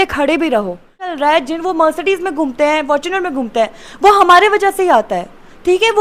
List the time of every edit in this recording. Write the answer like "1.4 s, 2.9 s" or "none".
1.1 s